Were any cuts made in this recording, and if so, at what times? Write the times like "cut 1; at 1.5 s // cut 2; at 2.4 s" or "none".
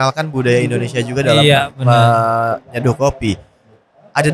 none

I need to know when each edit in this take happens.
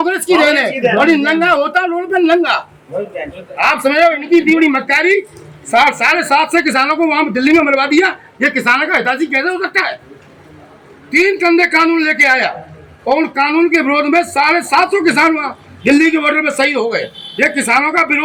none

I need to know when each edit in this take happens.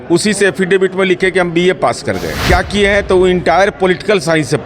cut 1; at 2.3 s

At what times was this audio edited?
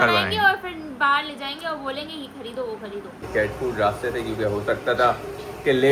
cut 1; at 3.3 s

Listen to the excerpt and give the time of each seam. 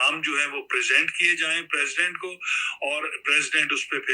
none

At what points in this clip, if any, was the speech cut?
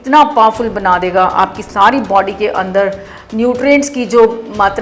none

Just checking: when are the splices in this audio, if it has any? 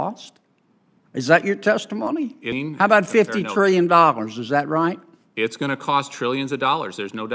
cut 1; at 2.5 s

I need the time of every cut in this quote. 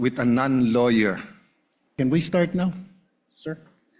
cut 1; at 1.9 s

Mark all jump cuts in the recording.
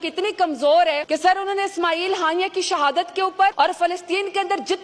cut 1; at 1.0 s // cut 2; at 3.5 s

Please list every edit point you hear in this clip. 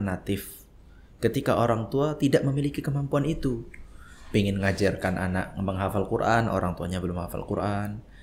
none

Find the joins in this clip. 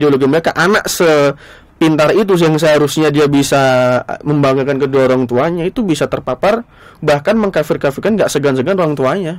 none

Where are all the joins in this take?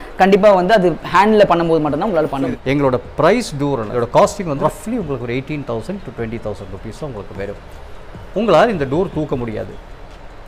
cut 1; at 2.5 s // cut 2; at 3.9 s // cut 3; at 4.6 s

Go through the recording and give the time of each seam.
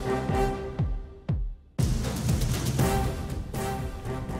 cut 1; at 2.4 s // cut 2; at 3.6 s

